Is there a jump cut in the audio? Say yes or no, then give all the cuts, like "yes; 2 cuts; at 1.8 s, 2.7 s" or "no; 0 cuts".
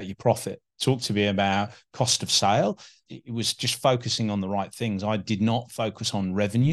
yes; 1 cut; at 3.1 s